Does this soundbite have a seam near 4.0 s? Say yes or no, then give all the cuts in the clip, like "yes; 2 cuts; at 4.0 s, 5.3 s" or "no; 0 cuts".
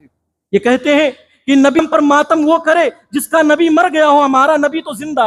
no; 1 cut; at 1.8 s